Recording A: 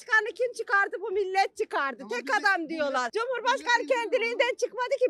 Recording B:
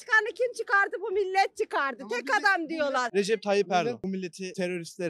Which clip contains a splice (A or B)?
B